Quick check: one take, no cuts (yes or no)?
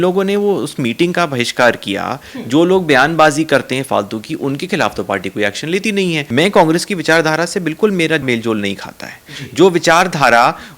no